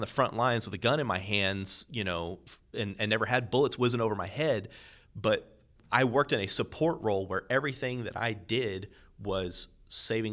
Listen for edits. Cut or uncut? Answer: uncut